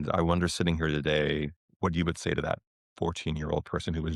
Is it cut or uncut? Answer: cut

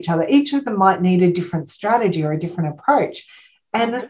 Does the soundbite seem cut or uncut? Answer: uncut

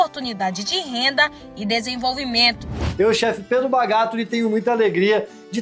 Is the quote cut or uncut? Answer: cut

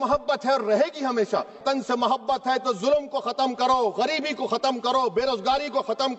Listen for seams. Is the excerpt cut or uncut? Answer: cut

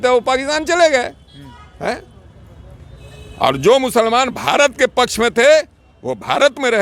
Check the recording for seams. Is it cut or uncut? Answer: uncut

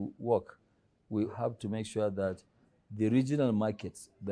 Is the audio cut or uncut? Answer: cut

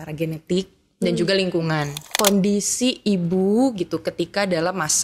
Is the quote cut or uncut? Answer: cut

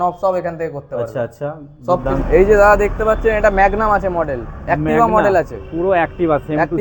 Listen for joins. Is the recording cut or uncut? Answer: cut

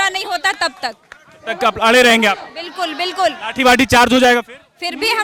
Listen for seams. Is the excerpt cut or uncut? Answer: uncut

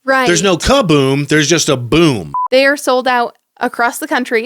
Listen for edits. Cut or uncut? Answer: cut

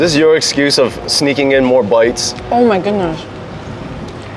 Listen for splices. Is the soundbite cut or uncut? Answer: uncut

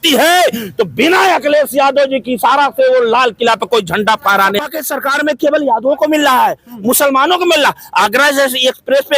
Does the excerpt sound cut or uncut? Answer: cut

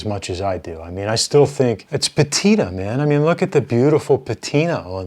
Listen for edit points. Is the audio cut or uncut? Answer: cut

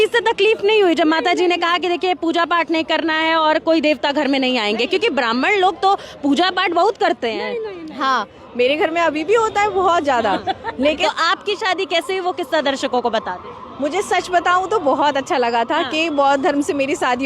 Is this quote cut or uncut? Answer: cut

